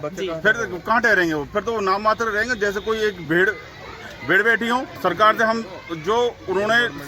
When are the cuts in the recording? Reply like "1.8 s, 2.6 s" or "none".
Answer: none